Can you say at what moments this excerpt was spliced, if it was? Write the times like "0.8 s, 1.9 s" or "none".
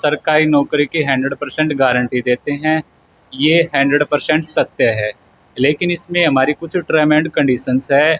none